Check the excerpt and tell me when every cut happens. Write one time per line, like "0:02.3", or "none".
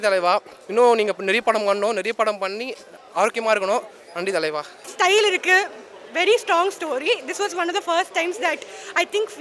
0:04.9